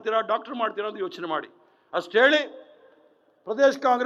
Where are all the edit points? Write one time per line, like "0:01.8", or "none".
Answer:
none

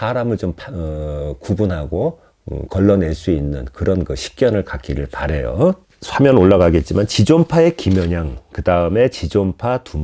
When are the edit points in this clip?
none

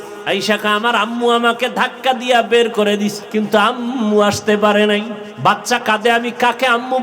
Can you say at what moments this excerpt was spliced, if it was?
0:03.2
0:05.2

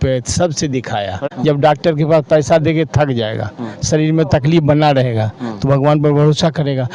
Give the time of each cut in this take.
0:01.2

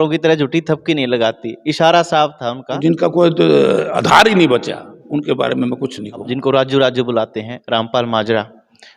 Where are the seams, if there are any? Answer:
0:02.8
0:06.3

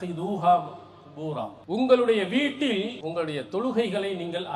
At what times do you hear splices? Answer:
0:01.5
0:03.0

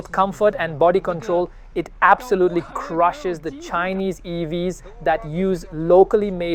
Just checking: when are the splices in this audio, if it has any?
none

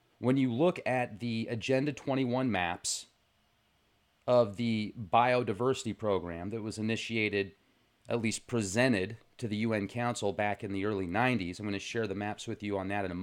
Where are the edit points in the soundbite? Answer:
none

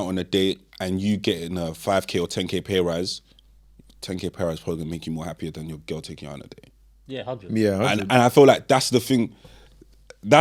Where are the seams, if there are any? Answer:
none

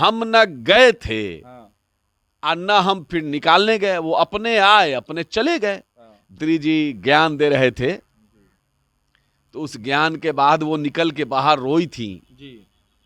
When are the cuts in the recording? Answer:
0:06.4

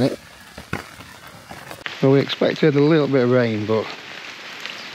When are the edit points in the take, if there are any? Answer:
0:01.8

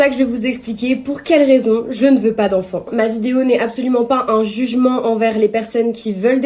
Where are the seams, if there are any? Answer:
none

